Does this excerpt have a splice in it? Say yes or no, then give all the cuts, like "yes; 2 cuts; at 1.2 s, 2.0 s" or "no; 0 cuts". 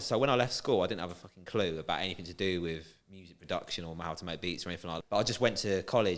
yes; 1 cut; at 4.9 s